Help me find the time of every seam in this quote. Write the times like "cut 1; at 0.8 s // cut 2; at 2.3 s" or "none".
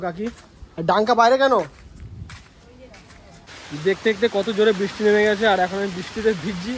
cut 1; at 3.5 s